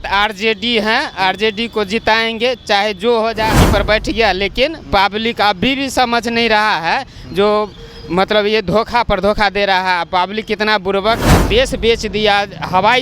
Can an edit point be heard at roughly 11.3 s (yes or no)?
yes